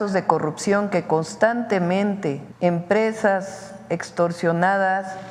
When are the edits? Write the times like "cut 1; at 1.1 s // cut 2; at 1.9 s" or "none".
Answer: cut 1; at 2.4 s